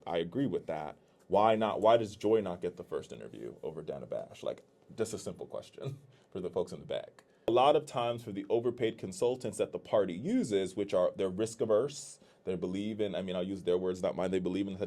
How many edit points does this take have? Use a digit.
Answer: 1